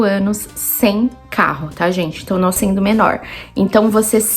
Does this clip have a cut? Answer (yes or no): yes